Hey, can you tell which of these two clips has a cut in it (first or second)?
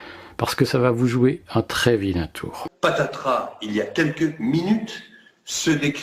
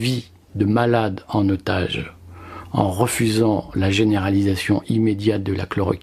first